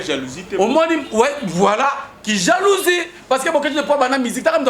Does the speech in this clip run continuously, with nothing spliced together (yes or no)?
yes